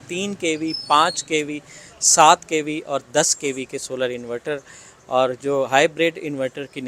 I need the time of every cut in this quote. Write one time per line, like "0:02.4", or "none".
none